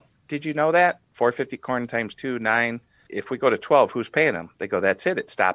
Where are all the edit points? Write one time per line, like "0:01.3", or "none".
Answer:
0:01.1
0:03.0